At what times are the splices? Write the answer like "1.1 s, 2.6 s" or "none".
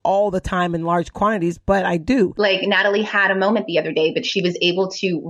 2.3 s